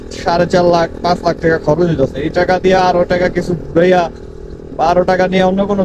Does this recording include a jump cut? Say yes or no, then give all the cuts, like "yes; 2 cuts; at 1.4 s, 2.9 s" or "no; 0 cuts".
no; 0 cuts